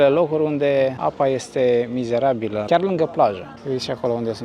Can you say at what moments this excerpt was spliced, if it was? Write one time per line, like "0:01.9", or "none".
0:01.0
0:02.7
0:03.5